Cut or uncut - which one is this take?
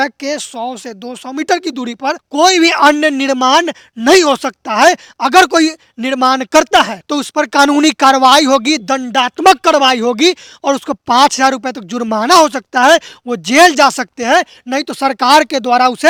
uncut